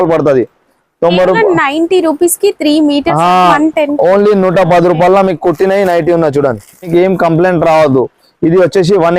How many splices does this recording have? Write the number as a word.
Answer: two